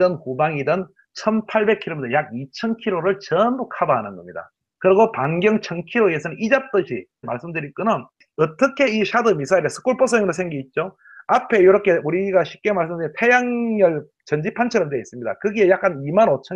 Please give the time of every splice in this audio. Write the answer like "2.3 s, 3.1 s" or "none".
none

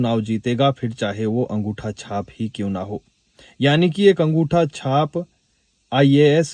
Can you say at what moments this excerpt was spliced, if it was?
none

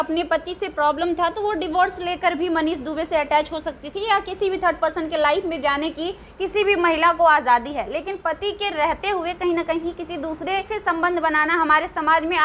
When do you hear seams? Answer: 10.7 s

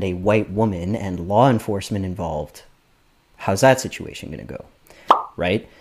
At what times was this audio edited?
none

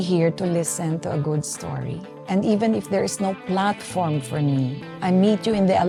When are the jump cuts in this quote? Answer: none

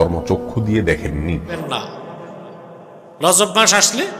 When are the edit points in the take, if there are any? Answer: 1.6 s

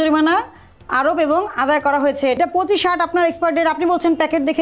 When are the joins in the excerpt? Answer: 2.3 s

